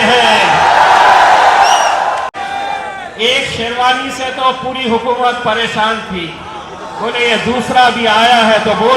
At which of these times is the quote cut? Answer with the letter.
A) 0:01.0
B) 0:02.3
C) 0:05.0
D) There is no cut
B